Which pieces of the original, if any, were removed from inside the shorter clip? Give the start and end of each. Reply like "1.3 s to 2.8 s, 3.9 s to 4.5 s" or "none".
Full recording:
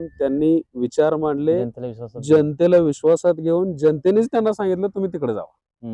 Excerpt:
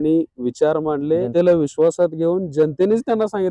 1.7 s to 2.5 s